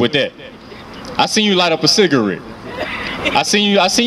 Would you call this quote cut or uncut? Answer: uncut